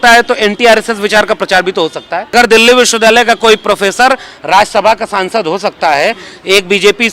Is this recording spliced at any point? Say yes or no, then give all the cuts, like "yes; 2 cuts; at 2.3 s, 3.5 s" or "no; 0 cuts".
yes; 1 cut; at 2.3 s